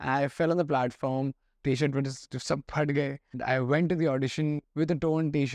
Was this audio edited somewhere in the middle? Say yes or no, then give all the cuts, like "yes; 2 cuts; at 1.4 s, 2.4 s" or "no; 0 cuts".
yes; 3 cuts; at 1.5 s, 3.4 s, 4.6 s